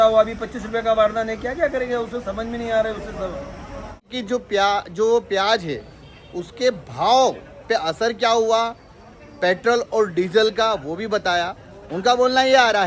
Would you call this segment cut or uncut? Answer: cut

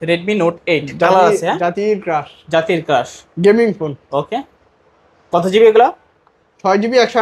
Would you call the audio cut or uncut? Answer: uncut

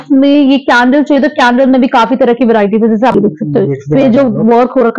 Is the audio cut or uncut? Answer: cut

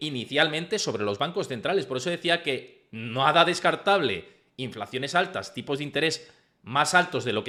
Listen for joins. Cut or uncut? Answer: uncut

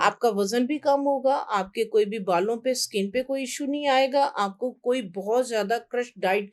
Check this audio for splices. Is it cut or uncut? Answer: uncut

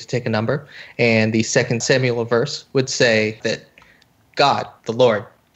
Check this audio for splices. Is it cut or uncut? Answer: cut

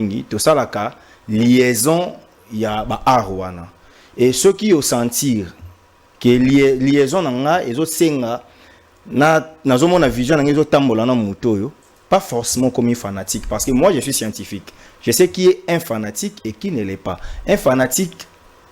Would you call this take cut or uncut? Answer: uncut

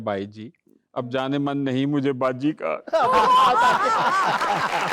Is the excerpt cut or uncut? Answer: uncut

